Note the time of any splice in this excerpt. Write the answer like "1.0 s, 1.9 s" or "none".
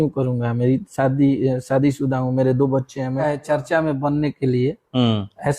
3.2 s